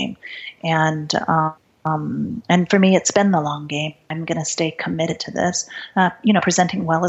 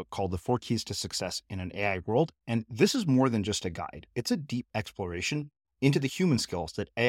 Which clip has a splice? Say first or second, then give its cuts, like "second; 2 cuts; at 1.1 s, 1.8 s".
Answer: first; 2 cuts; at 1.7 s, 4.0 s